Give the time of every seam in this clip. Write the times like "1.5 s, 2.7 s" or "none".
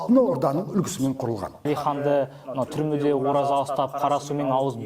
1.7 s